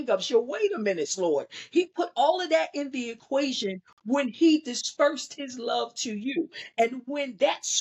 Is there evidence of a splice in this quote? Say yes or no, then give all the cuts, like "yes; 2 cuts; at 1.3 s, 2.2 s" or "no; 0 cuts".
no; 0 cuts